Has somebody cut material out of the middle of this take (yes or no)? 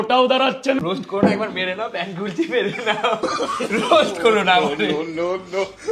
yes